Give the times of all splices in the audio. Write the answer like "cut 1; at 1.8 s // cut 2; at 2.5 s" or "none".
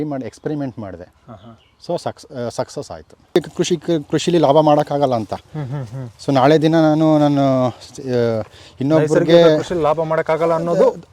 cut 1; at 3.4 s